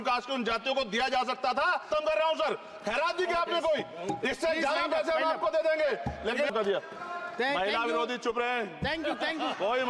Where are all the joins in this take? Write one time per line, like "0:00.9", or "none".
0:01.9
0:06.5